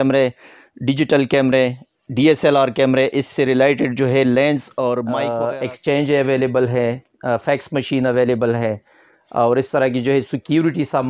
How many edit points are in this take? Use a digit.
1